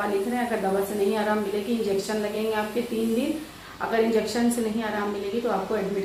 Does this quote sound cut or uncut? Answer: uncut